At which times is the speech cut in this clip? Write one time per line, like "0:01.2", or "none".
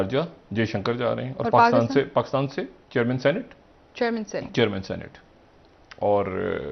none